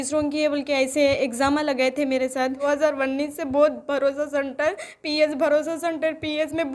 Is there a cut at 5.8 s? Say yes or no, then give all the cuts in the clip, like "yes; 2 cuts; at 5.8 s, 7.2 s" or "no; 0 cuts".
no; 1 cut; at 2.7 s